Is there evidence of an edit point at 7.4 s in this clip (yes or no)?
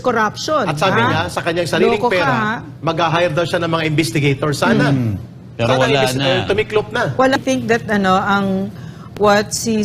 yes